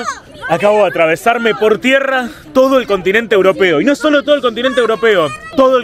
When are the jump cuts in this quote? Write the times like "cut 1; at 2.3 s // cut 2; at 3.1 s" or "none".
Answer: none